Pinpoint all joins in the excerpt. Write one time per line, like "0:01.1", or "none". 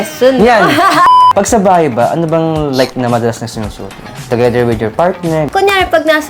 0:01.2
0:04.2
0:05.5